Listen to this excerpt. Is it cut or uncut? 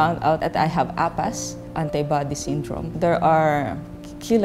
cut